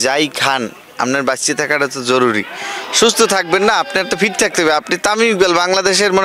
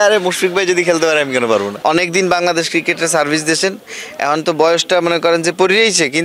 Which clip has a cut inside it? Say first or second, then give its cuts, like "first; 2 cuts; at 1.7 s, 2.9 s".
second; 1 cut; at 1.7 s